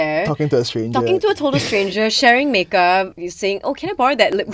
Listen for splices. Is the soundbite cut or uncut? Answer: cut